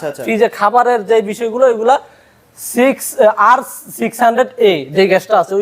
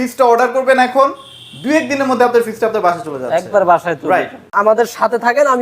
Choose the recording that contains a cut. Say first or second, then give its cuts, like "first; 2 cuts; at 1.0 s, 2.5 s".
second; 1 cut; at 4.5 s